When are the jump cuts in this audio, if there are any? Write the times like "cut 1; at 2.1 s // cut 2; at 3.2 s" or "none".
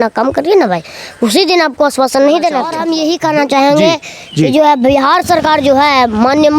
cut 1; at 2.8 s